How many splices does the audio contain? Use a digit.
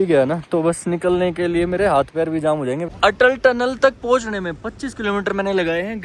1